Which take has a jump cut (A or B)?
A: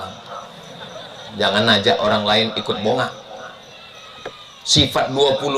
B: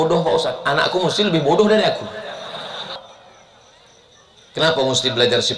B